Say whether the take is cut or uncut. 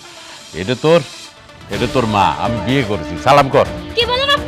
uncut